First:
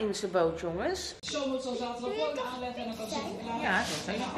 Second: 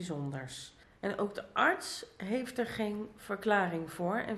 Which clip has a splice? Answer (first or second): first